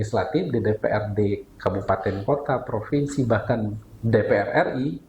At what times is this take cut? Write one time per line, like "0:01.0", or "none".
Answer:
none